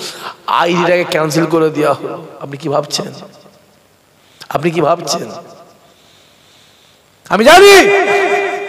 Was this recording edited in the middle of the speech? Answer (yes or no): no